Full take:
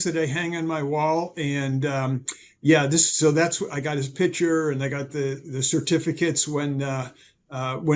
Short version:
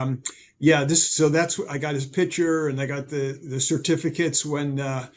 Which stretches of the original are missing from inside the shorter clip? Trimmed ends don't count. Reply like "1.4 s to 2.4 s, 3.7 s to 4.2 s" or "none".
none